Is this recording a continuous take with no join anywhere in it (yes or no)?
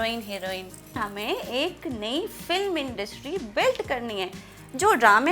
no